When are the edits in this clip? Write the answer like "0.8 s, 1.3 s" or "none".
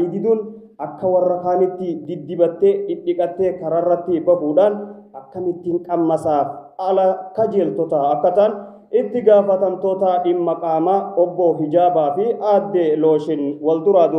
none